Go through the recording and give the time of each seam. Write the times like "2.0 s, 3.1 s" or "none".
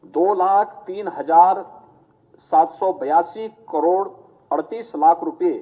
none